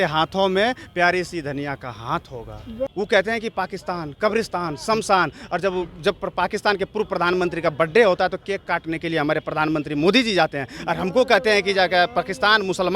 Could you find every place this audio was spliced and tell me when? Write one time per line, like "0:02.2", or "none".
0:02.9